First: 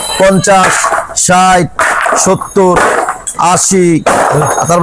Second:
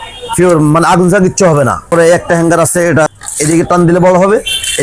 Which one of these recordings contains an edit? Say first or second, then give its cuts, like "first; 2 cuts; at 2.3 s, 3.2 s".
second; 2 cuts; at 1.8 s, 3.1 s